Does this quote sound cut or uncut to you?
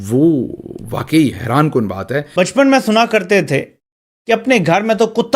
cut